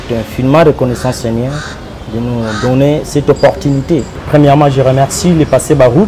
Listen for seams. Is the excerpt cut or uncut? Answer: cut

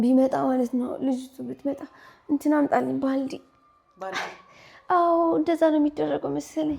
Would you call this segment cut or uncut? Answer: uncut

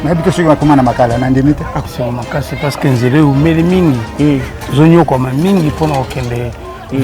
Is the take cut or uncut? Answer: cut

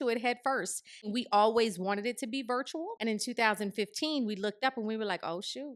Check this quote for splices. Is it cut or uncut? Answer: cut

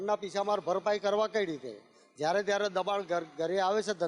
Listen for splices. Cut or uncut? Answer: uncut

